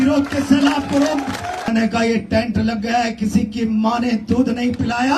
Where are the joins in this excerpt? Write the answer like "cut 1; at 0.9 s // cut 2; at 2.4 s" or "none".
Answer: cut 1; at 1.7 s